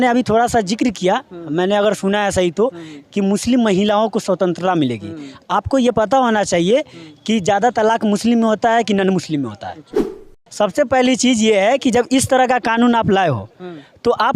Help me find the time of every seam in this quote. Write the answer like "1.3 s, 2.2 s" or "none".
10.1 s